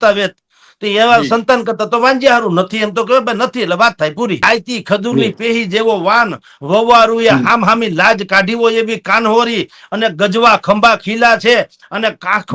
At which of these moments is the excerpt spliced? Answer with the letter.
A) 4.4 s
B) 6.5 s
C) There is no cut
A